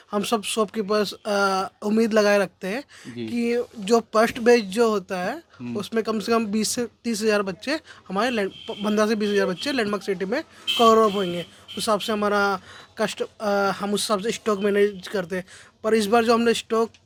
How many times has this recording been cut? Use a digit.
0